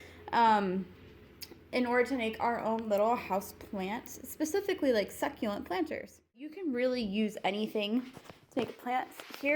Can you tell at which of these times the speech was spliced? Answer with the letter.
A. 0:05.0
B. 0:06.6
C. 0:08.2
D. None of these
B